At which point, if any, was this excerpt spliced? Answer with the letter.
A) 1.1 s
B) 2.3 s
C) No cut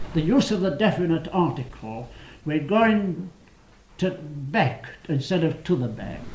B